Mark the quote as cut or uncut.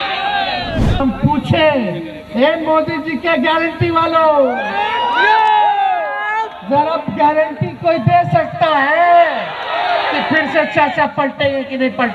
cut